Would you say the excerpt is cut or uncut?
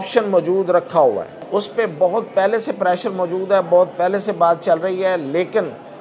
cut